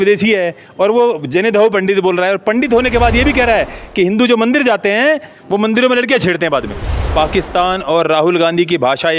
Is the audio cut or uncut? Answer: cut